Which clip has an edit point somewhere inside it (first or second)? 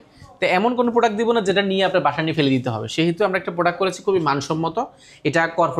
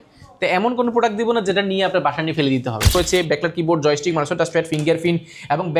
second